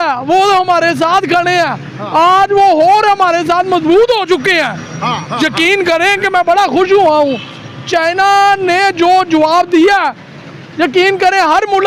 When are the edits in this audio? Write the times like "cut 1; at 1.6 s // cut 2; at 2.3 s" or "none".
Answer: none